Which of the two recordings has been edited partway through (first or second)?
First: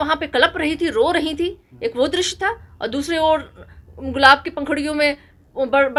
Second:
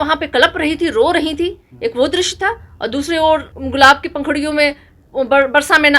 second